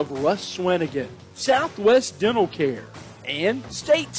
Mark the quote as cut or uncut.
uncut